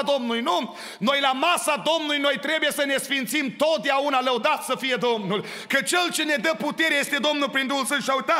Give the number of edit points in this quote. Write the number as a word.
zero